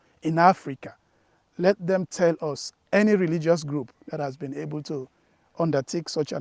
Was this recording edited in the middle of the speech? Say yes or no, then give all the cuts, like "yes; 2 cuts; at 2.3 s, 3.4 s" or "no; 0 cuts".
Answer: no; 0 cuts